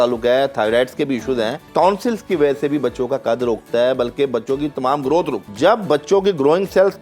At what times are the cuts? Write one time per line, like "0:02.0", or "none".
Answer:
0:01.7
0:05.4